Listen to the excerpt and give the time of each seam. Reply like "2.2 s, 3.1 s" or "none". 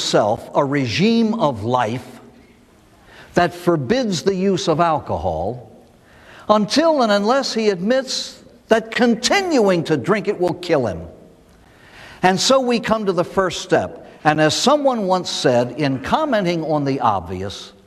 13.9 s

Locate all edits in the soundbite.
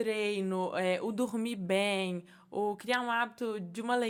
none

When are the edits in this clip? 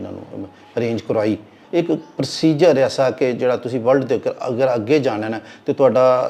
1.5 s

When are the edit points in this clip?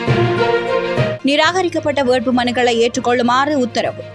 1.2 s

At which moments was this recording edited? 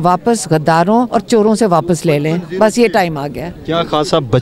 1.1 s

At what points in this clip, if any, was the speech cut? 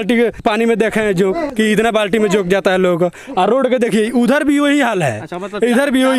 none

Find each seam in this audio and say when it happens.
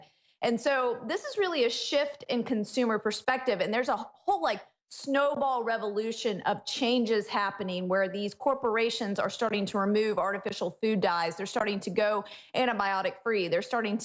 7.6 s

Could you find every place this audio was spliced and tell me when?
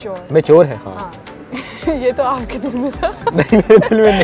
none

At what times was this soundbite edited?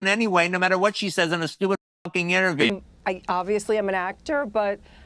2.7 s

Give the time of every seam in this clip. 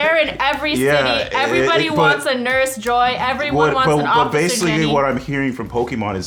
none

